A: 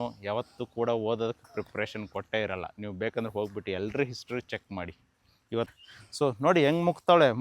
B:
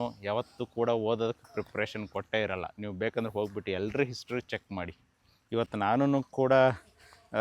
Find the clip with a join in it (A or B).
A